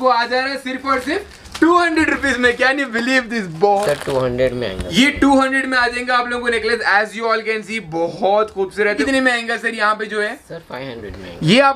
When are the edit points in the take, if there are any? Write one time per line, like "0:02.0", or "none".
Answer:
0:03.7
0:09.0